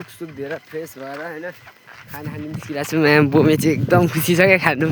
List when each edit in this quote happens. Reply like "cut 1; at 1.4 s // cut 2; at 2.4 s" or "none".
none